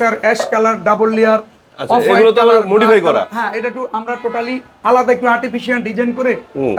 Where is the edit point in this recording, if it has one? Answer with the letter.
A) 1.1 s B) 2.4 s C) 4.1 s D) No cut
D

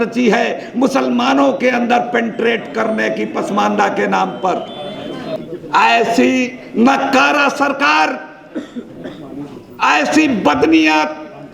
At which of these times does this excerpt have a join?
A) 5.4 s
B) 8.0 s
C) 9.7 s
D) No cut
A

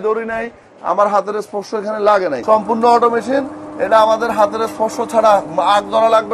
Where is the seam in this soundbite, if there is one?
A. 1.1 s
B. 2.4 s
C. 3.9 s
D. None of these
B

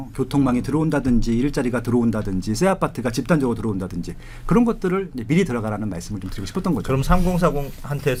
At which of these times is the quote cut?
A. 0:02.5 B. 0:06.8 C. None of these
C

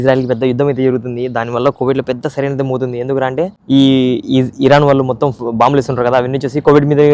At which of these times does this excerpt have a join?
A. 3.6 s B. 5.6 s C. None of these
A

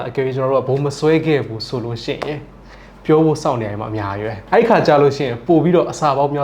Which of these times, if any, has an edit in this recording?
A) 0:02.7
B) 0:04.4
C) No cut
B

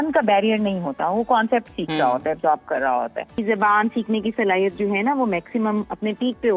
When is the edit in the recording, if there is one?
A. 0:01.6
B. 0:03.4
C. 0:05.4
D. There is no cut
B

